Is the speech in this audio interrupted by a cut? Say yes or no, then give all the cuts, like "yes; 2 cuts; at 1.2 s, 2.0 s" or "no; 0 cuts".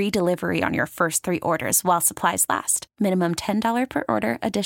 no; 0 cuts